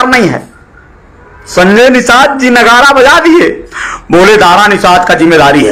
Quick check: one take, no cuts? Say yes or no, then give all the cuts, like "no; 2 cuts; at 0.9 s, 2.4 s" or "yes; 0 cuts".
yes; 0 cuts